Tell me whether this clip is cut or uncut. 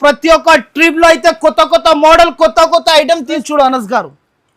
cut